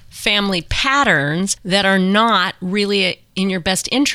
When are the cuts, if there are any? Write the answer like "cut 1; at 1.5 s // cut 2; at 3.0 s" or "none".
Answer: cut 1; at 1.6 s

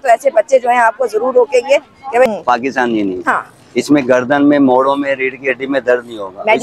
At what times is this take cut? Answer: cut 1; at 2.3 s

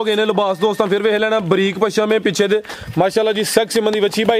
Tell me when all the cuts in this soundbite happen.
none

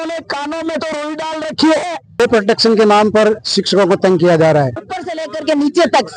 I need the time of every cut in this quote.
cut 1; at 2.0 s // cut 2; at 4.8 s

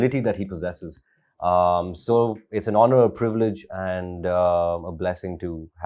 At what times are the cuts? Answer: none

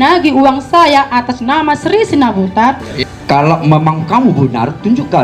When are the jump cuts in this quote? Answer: cut 1; at 2.9 s

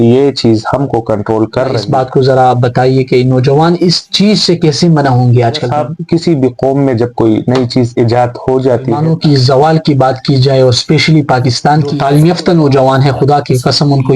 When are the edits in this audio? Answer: cut 1; at 1.8 s // cut 2; at 5.7 s // cut 3; at 9.0 s // cut 4; at 12.0 s

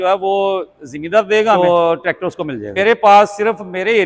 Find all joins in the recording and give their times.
cut 1; at 1.6 s // cut 2; at 2.6 s

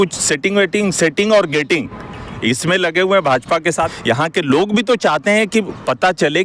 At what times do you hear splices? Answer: cut 1; at 3.9 s

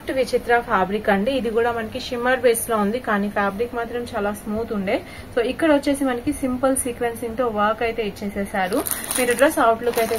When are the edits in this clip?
none

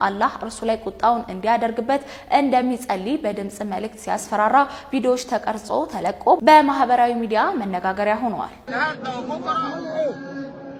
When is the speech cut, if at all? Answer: none

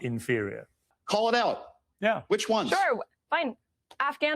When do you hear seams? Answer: cut 1; at 0.9 s

